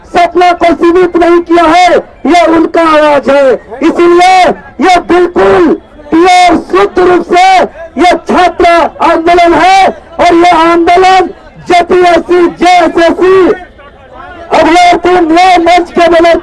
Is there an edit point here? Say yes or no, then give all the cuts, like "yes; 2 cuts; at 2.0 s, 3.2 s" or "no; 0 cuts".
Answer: no; 0 cuts